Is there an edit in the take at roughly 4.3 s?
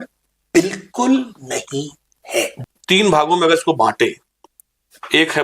no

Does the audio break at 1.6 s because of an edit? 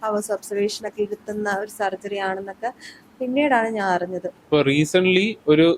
no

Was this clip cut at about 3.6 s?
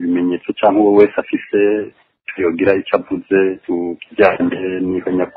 yes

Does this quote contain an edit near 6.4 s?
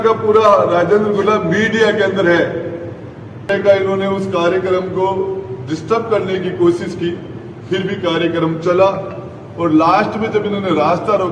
no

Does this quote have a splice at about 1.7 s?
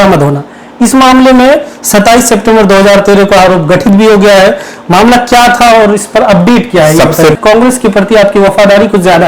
no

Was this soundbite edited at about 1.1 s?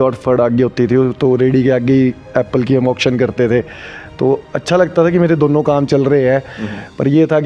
no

